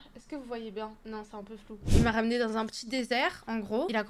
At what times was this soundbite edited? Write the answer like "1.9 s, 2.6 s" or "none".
1.9 s